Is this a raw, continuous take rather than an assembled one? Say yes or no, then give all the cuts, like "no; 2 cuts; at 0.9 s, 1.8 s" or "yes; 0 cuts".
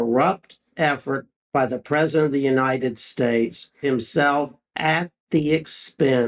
no; 2 cuts; at 3.8 s, 4.6 s